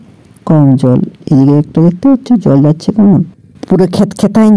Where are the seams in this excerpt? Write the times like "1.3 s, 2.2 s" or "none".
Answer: none